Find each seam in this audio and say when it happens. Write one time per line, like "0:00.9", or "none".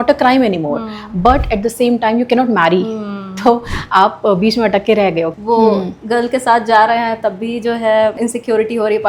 0:05.3
0:08.2